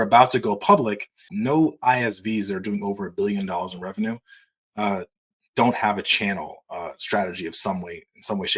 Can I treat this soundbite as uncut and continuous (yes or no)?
no